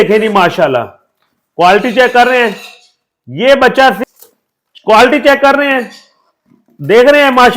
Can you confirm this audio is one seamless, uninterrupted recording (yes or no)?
no